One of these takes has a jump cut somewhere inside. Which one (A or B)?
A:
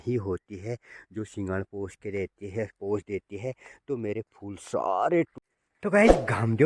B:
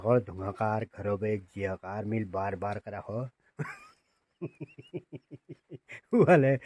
A